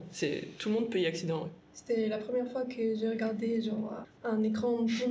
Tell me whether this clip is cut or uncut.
cut